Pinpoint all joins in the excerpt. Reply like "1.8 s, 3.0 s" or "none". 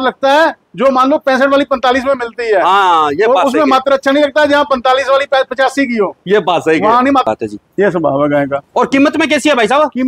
7.2 s